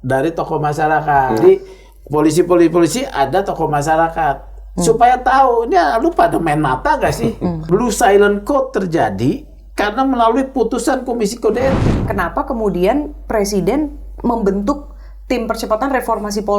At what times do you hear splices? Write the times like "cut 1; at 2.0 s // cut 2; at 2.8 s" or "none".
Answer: cut 1; at 1.4 s // cut 2; at 7.7 s // cut 3; at 12.1 s